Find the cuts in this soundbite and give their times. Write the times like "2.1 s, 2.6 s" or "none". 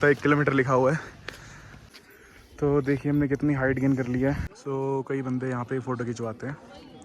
1.9 s, 4.6 s